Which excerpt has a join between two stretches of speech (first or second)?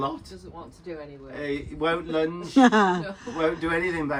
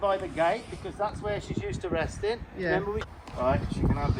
second